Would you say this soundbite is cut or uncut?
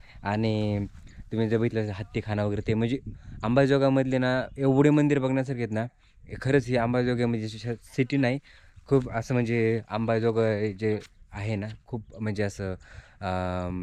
uncut